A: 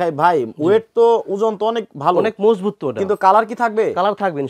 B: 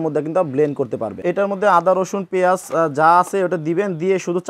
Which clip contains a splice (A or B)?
B